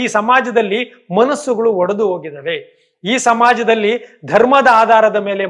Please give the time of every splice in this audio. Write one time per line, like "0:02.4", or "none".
none

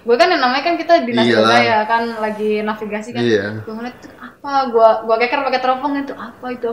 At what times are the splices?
none

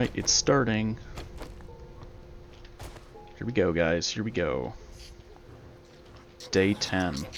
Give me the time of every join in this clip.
none

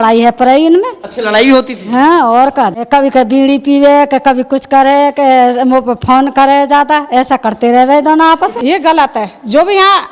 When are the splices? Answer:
0:02.8
0:08.6

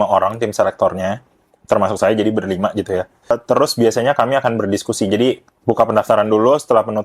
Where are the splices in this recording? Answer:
0:03.4

